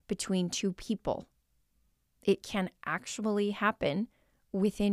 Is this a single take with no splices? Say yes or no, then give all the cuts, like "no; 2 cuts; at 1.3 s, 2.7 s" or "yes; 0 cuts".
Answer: yes; 0 cuts